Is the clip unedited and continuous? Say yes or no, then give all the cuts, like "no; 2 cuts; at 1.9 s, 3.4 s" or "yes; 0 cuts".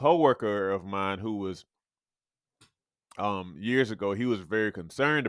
yes; 0 cuts